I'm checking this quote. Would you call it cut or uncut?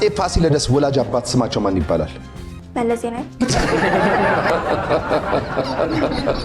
uncut